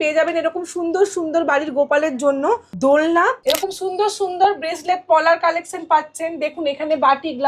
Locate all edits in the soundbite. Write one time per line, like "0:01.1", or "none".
0:02.7
0:03.4